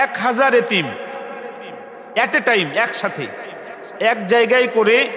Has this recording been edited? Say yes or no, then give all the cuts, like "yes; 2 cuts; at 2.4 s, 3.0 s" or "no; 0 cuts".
no; 0 cuts